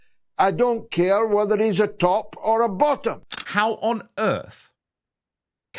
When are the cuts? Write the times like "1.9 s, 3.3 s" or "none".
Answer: 3.3 s